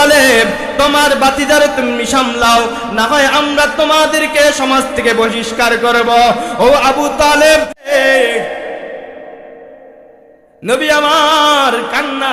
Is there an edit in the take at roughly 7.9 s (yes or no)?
yes